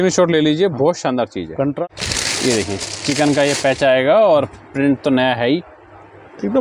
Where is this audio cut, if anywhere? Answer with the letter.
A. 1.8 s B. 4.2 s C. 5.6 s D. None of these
A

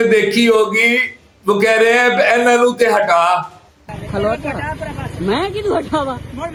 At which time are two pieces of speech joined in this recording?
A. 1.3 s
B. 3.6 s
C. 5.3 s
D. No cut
D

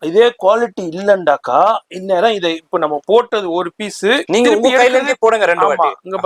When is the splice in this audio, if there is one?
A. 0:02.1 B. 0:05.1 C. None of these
C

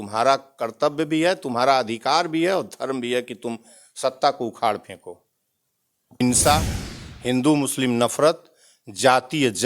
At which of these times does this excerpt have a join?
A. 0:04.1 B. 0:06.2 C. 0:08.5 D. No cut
B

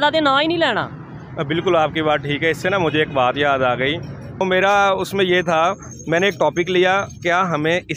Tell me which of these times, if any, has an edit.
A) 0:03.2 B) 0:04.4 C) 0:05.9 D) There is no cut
B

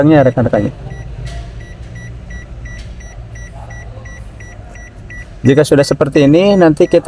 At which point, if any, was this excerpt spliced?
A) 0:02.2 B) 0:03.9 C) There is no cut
C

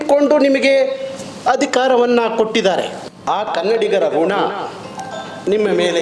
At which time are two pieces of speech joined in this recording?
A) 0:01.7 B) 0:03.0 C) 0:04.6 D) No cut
B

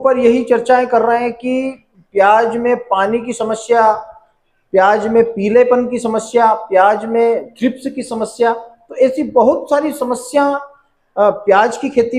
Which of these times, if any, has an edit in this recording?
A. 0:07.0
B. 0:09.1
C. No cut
C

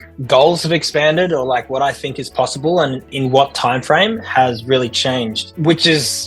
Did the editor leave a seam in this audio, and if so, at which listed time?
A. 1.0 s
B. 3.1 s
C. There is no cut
B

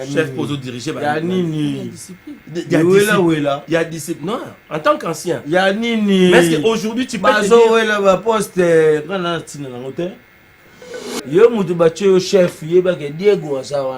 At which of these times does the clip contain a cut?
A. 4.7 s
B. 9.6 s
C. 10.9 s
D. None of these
C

